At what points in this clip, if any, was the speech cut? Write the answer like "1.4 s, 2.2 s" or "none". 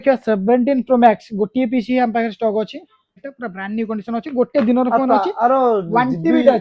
3.3 s